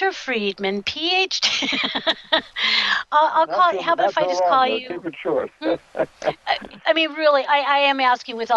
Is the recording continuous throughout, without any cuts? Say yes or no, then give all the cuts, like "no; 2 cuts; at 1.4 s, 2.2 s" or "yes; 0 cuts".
no; 1 cut; at 2.2 s